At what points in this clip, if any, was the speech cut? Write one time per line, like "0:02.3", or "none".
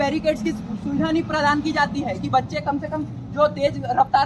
none